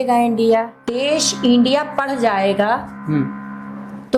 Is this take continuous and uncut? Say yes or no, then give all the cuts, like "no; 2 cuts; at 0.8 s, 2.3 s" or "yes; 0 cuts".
no; 1 cut; at 0.9 s